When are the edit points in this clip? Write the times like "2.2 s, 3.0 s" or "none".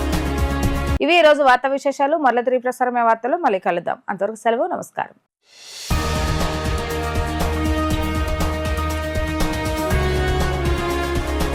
none